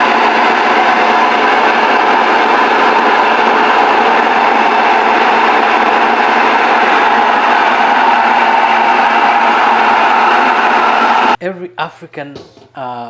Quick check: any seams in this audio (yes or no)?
no